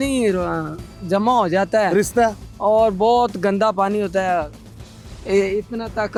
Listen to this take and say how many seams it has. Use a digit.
0